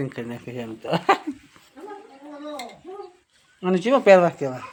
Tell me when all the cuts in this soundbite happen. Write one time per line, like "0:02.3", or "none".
none